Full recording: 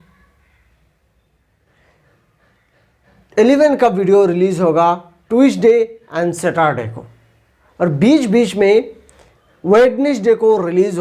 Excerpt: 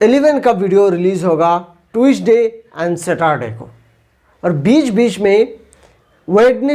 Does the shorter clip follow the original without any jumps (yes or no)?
yes